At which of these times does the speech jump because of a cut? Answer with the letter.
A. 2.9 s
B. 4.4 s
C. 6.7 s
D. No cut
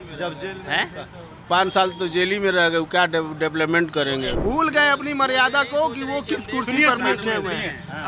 B